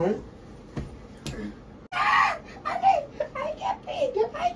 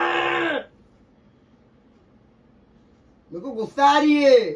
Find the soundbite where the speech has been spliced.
first; 1 cut; at 1.9 s

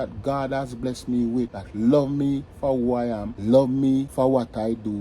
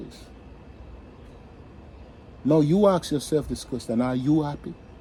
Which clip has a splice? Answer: first; 3 cuts; at 1.6 s, 3.3 s, 4.1 s

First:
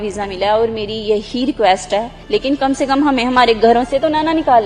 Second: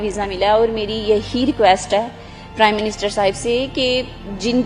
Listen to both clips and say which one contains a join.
first; 1 cut; at 2.1 s

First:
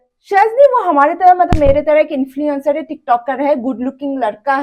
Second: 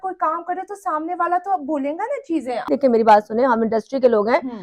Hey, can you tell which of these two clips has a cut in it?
second; 1 cut; at 2.7 s

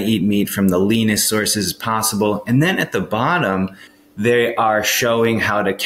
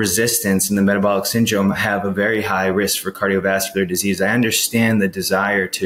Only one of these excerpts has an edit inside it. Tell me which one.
first; 1 cut; at 3.9 s

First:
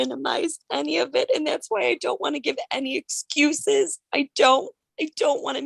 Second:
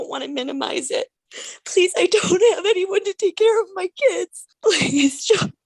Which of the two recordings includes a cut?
second; 2 cuts; at 1.2 s, 4.4 s

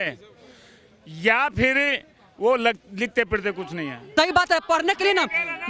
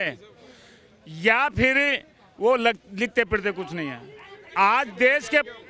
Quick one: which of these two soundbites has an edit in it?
first; 1 cut; at 4.1 s

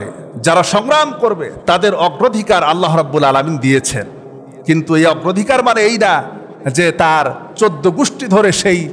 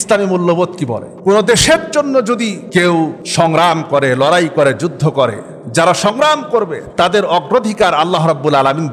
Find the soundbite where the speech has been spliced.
second; 3 cuts; at 1.1 s, 2.6 s, 3.2 s

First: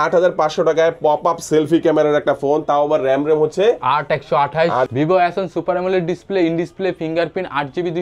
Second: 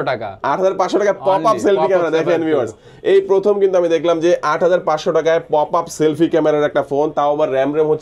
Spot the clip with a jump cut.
first; 1 cut; at 4.9 s

